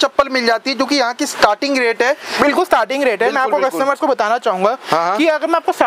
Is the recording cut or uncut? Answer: uncut